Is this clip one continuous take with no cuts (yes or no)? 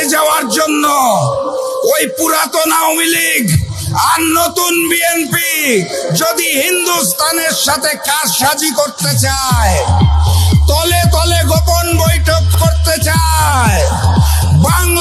yes